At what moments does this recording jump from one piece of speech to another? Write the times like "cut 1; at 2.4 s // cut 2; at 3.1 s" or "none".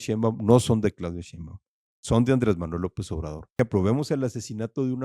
cut 1; at 3.5 s